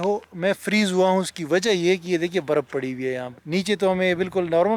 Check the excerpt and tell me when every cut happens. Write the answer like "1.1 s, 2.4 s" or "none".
3.3 s